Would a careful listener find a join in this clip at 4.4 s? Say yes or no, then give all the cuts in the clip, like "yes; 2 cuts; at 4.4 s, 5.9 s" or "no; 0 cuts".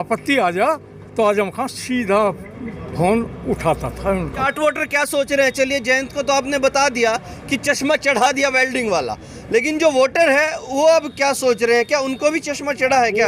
yes; 1 cut; at 4.4 s